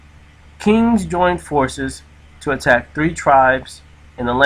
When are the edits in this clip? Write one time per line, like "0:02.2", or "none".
0:01.5